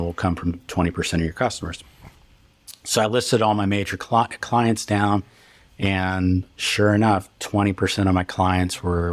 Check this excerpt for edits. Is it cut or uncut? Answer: uncut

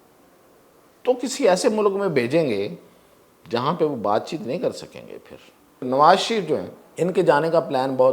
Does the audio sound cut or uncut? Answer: cut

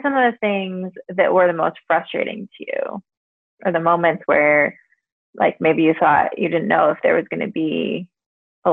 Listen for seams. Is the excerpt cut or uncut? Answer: uncut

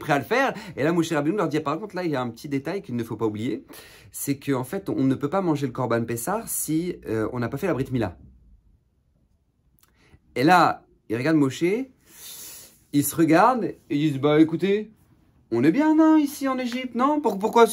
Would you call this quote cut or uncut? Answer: uncut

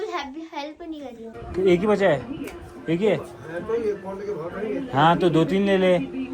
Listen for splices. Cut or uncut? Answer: cut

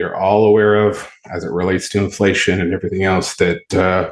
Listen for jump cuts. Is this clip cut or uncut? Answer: uncut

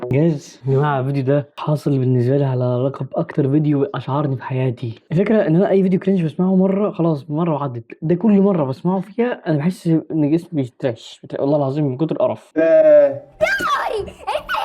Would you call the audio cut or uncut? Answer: cut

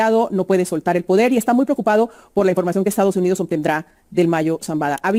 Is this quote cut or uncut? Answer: uncut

